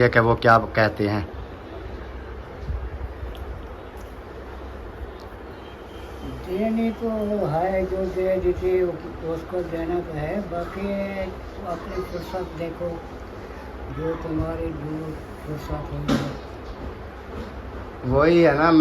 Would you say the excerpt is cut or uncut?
uncut